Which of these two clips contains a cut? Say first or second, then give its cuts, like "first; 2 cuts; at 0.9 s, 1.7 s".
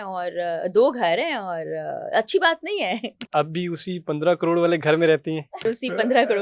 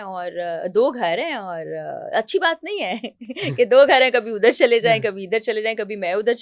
first; 2 cuts; at 3.2 s, 5.6 s